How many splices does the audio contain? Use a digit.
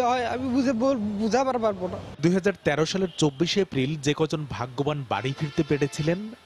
0